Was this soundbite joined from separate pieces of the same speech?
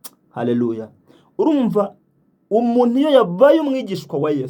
no; 0 cuts

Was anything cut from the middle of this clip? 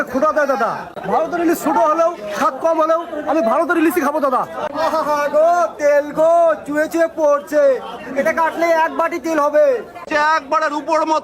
yes; 3 cuts; at 0.9 s, 4.7 s, 10.1 s

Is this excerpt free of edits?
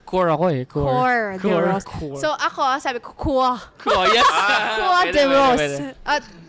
yes; 0 cuts

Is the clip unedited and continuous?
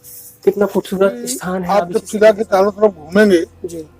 no; 1 cut; at 1.5 s

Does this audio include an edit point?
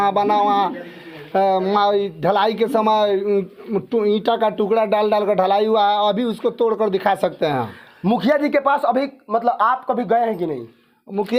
no; 0 cuts

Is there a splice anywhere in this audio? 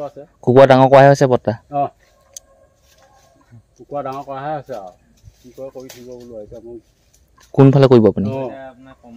no; 0 cuts

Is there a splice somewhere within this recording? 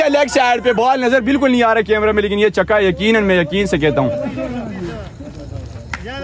no; 0 cuts

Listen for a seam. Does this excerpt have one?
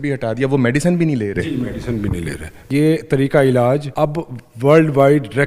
yes; 2 cuts; at 2.7 s, 3.9 s

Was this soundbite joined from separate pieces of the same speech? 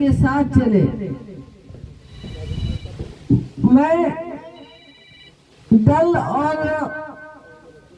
no; 0 cuts

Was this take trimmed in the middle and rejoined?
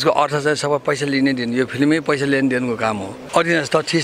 yes; 1 cut; at 3.1 s

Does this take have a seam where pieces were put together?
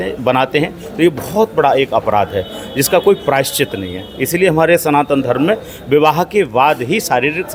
no; 0 cuts

